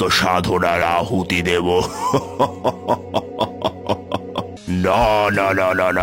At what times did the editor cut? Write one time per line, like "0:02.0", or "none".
0:04.5